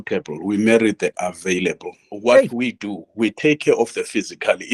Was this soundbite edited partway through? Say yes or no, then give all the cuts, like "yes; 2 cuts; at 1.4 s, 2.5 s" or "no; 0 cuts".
yes; 1 cut; at 2.5 s